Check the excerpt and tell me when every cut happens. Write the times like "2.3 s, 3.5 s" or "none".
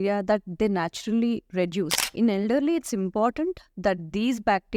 2.0 s